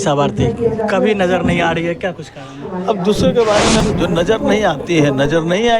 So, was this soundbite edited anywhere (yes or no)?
yes